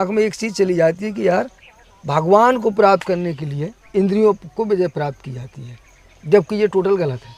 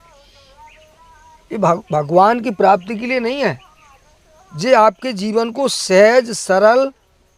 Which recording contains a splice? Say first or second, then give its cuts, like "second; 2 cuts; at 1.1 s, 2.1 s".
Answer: first; 1 cut; at 3.8 s